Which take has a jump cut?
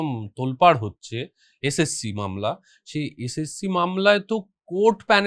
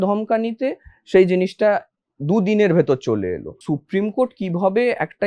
second; 1 cut; at 3.5 s

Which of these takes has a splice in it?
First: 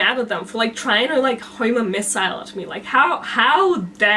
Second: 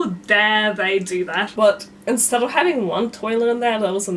second; 1 cut; at 1.5 s

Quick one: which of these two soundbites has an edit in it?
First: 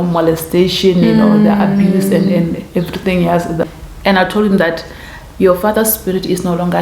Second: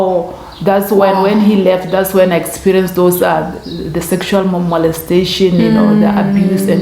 first; 1 cut; at 3.6 s

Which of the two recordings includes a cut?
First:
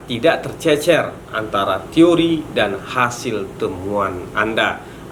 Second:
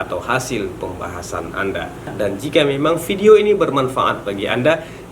second; 1 cut; at 2.1 s

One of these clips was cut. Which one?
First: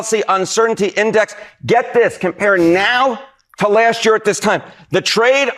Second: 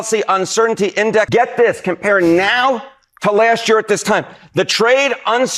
second; 1 cut; at 1.3 s

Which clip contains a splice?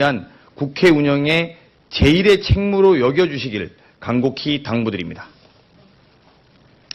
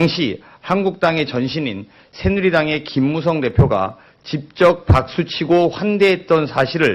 first; 1 cut; at 1.4 s

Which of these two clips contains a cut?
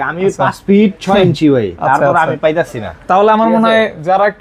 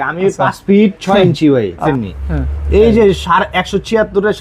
second; 1 cut; at 1.8 s

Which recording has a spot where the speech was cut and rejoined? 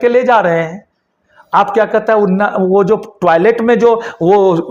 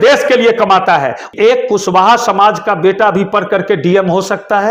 second; 1 cut; at 1.3 s

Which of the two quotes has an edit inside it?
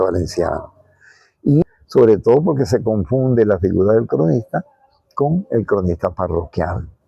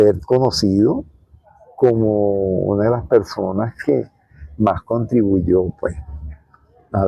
first; 1 cut; at 1.6 s

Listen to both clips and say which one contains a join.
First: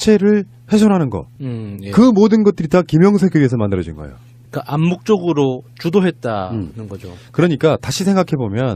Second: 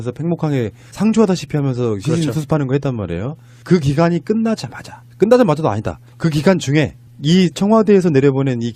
first; 1 cut; at 7.2 s

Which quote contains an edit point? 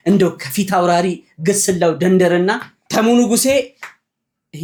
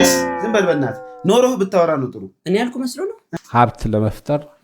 second; 1 cut; at 3.2 s

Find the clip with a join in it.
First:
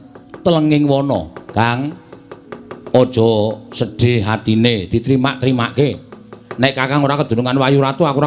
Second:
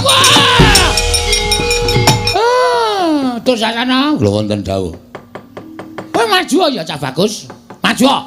second; 1 cut; at 2.3 s

